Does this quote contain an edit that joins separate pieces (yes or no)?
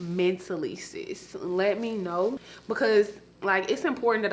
yes